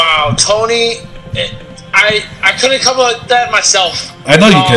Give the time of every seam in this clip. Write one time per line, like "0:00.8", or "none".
none